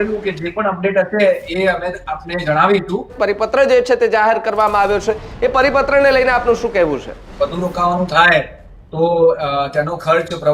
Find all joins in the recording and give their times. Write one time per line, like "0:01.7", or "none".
0:03.1
0:07.2

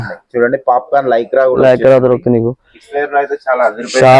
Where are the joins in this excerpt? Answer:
none

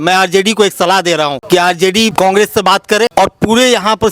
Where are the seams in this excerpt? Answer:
0:01.4
0:02.1
0:03.1

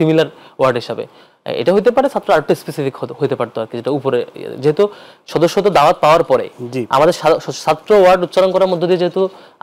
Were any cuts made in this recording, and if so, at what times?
none

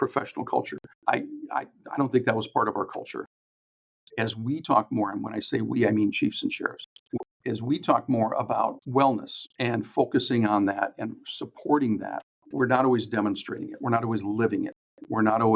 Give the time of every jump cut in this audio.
0:03.5
0:12.4

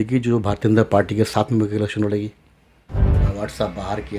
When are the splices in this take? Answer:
0:03.2

